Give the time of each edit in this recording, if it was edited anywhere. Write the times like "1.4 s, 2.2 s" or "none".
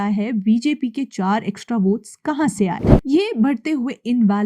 2.9 s